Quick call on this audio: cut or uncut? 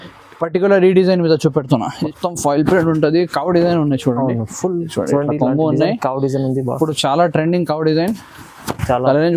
cut